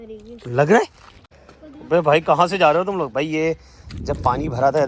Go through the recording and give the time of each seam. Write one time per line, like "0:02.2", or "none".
0:01.1